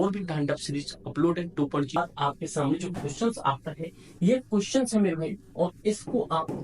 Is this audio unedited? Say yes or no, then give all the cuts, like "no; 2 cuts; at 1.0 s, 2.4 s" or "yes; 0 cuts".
no; 1 cut; at 2.0 s